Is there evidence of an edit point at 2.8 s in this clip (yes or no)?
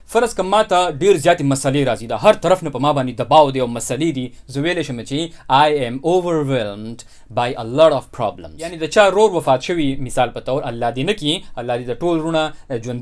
no